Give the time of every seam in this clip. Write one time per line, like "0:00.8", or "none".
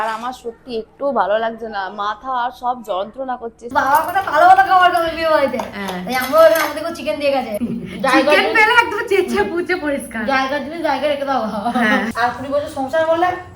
0:03.6
0:07.6
0:12.1